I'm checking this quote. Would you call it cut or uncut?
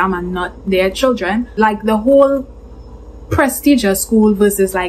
uncut